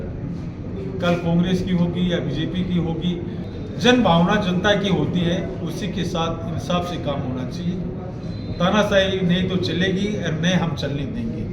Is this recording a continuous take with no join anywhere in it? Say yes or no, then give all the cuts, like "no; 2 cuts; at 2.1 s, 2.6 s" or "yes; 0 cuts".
no; 1 cut; at 3.5 s